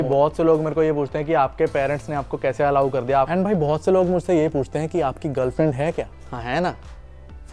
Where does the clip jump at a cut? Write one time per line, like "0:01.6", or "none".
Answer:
0:03.3
0:06.2

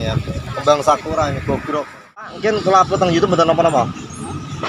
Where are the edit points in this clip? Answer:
0:02.3

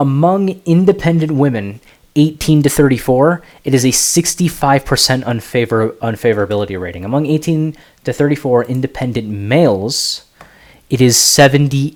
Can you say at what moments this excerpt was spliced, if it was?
none

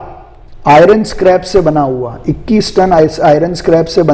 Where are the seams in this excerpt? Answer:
none

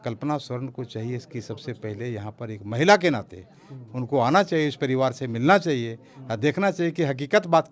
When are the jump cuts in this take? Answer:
none

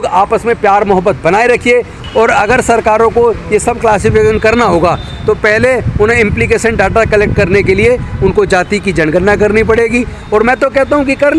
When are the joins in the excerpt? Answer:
0:02.0

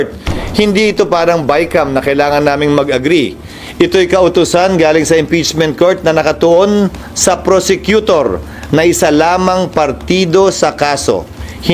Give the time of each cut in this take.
none

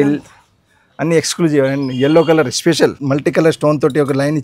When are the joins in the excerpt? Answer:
0:03.0

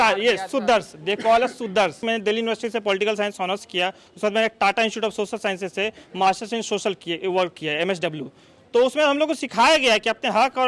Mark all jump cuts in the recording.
0:02.0

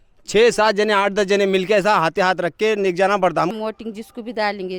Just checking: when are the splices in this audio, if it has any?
0:03.5

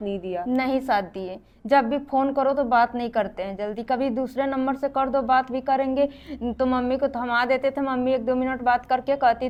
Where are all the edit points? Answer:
none

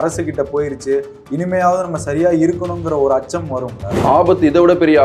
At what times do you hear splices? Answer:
0:04.0

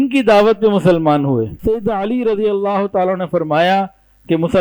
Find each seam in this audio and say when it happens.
0:01.6

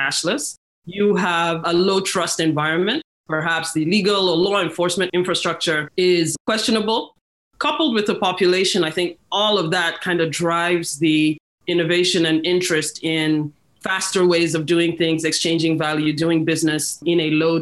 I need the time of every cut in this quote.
0:03.1
0:05.4
0:07.2

